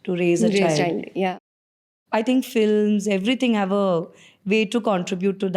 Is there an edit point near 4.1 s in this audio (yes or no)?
no